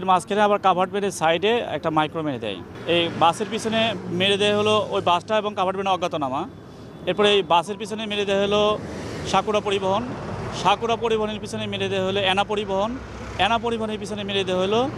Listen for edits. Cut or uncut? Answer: uncut